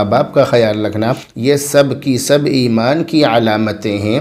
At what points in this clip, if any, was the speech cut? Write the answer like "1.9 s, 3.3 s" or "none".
1.3 s